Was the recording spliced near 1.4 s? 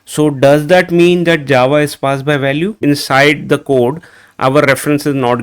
no; 1 cut; at 2.8 s

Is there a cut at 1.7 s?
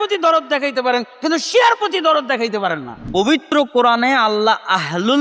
no; 1 cut; at 3.3 s

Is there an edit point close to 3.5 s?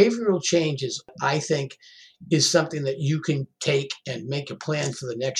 no; 1 cut; at 1.1 s

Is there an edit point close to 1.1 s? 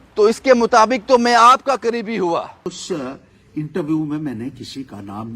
no; 1 cut; at 2.5 s

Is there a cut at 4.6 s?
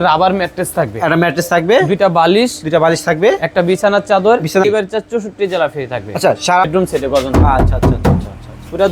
yes; 2 cuts; at 4.6 s, 6.7 s

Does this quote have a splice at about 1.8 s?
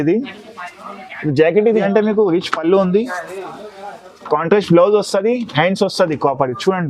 yes; 1 cut; at 1.8 s

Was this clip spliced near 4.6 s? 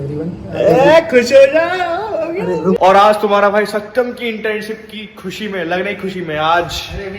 no; 1 cut; at 2.8 s

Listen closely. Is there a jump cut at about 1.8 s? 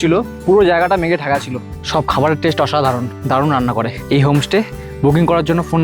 yes; 3 cuts; at 1.8 s, 3.1 s, 4.0 s

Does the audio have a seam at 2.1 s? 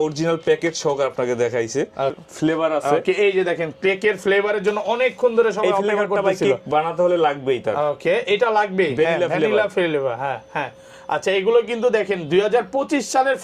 yes; 1 cut; at 2.1 s

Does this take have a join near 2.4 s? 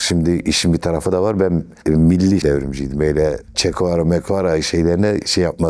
yes; 1 cut; at 2.4 s

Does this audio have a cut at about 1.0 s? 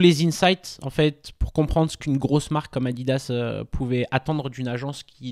no; 0 cuts

